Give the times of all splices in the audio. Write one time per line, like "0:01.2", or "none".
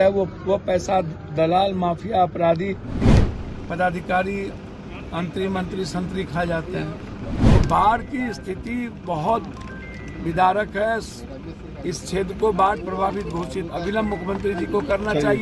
0:03.0
0:07.3